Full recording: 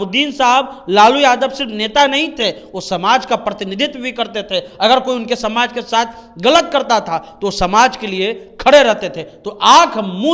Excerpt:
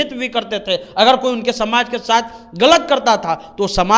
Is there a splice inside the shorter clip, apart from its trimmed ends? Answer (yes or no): no